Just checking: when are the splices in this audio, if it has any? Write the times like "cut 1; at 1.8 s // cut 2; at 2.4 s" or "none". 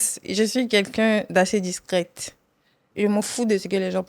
cut 1; at 2.8 s